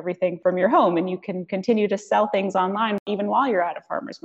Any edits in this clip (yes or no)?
yes